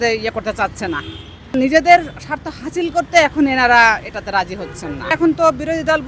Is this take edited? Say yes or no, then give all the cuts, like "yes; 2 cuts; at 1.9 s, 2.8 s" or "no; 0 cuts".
no; 0 cuts